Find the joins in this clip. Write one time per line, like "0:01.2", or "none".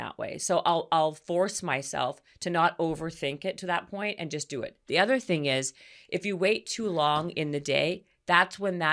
none

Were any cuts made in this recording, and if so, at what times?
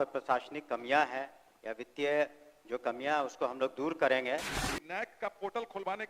0:04.6

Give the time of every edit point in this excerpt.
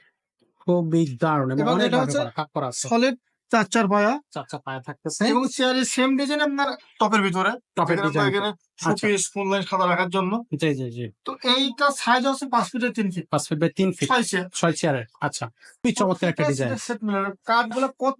0:15.8

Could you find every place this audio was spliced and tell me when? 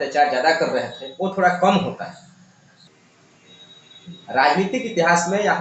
0:02.8

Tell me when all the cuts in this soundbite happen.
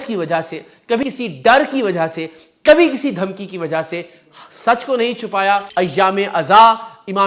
0:01.0
0:05.7

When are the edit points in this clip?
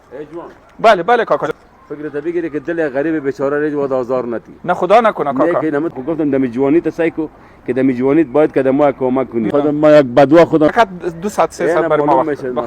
0:01.5
0:05.9
0:09.5
0:10.7

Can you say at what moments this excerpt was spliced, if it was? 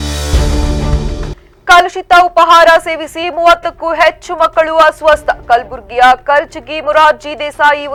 none

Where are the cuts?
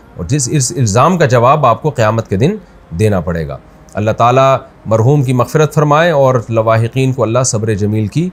none

